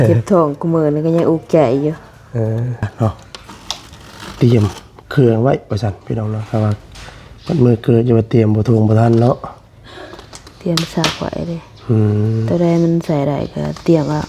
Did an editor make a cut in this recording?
yes; 1 cut; at 2.9 s

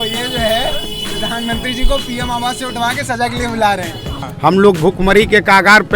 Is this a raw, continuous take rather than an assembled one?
no; 1 cut; at 4.2 s

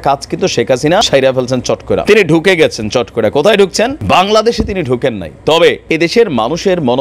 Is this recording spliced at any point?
yes; 4 cuts; at 1.1 s, 2.0 s, 4.0 s, 5.8 s

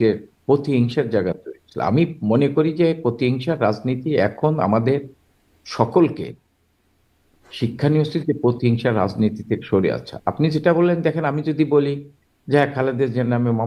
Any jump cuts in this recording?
no; 0 cuts

